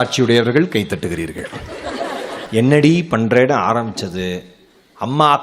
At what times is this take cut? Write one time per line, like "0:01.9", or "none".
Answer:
0:02.4